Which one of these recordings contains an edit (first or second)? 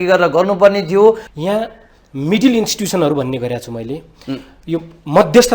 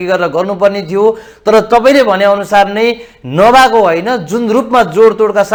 first